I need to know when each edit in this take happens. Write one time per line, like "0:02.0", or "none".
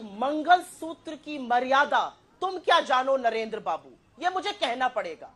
none

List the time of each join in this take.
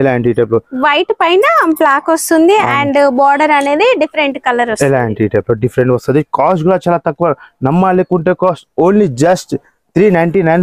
none

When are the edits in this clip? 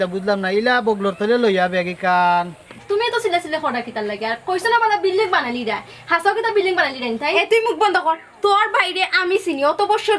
0:02.7

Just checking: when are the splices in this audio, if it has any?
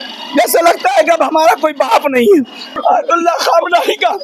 0:02.7

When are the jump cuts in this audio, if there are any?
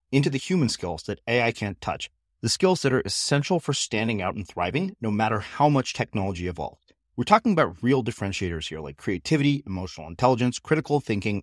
none

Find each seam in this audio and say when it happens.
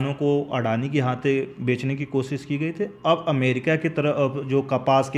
none

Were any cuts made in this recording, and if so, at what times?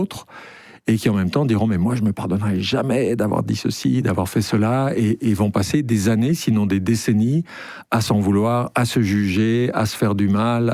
none

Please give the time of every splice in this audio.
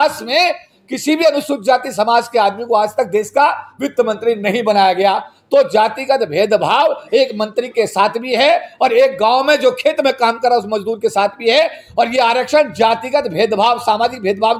none

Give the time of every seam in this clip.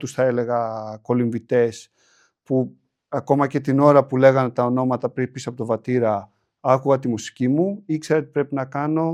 none

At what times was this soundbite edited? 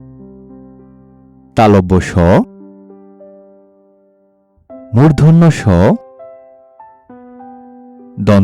none

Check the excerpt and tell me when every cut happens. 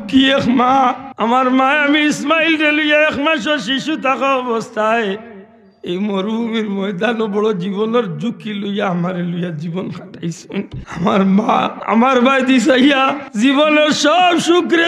0:01.1
0:10.8
0:11.8
0:13.2

